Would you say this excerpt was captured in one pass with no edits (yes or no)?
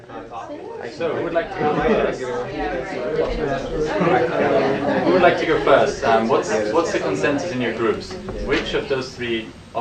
yes